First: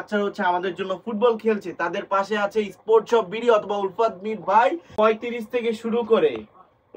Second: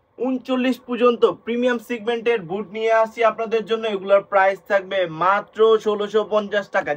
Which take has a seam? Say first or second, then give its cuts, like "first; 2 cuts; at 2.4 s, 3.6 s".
first; 1 cut; at 4.8 s